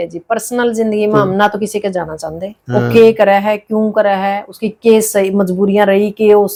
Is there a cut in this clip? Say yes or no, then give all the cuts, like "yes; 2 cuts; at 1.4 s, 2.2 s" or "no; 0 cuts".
no; 0 cuts